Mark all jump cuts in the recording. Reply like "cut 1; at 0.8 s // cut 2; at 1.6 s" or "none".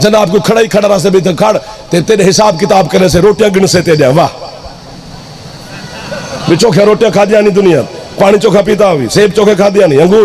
none